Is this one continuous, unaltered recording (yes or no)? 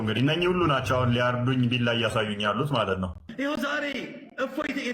yes